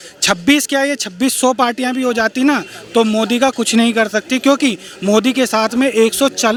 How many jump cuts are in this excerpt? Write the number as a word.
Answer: zero